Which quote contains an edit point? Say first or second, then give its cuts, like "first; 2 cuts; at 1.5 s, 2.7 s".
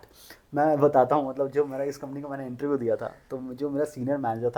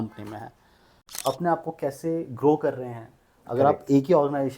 second; 1 cut; at 1.0 s